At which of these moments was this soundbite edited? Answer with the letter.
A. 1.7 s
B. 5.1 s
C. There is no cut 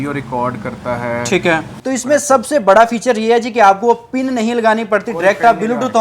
A